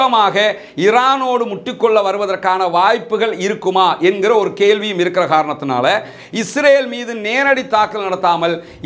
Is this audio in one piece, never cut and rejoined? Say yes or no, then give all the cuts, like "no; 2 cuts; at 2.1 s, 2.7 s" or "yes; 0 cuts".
yes; 0 cuts